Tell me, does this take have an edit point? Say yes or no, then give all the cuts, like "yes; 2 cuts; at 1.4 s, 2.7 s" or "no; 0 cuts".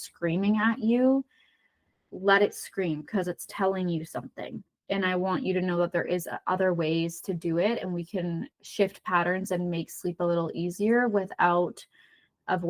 no; 0 cuts